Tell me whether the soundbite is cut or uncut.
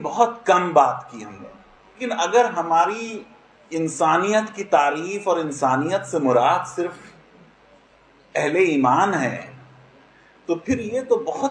cut